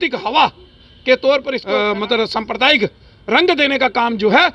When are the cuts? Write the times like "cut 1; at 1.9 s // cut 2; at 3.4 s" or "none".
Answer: cut 1; at 1.6 s

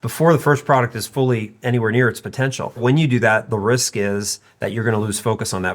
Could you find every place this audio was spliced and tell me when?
cut 1; at 2.8 s

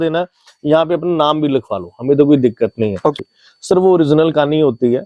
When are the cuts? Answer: cut 1; at 3.2 s

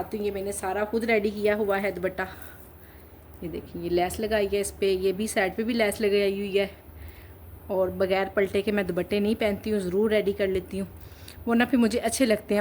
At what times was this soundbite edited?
none

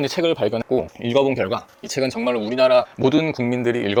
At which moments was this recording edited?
none

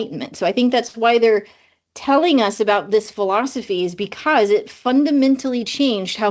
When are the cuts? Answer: none

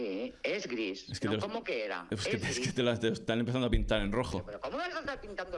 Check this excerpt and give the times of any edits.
cut 1; at 4.5 s

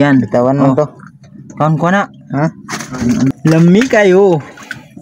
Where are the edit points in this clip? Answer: cut 1; at 3.3 s

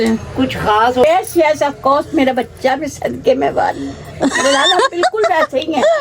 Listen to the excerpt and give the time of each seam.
cut 1; at 1.0 s

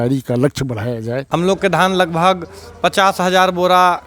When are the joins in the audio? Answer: cut 1; at 1.2 s

